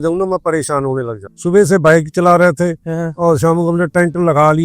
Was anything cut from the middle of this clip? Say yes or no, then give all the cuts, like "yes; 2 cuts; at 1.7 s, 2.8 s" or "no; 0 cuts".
yes; 1 cut; at 1.2 s